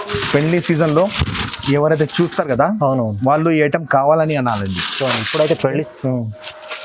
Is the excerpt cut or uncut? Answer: cut